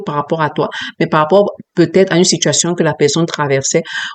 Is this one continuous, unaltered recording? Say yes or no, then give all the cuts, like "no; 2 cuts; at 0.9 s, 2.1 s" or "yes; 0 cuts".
yes; 0 cuts